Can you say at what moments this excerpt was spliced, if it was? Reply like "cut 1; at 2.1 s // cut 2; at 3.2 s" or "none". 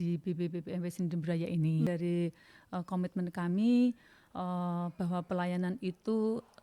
cut 1; at 1.9 s